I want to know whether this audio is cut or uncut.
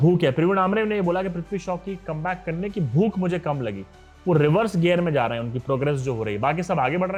uncut